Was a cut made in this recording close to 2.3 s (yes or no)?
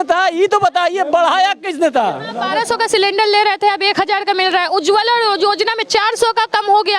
yes